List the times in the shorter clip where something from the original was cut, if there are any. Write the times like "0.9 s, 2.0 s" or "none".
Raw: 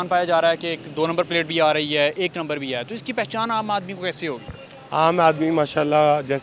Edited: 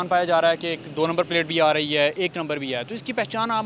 none